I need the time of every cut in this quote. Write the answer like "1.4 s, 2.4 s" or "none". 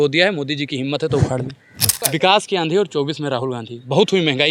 2.0 s